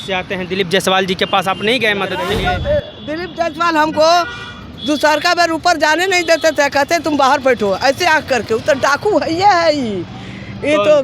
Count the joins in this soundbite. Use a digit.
1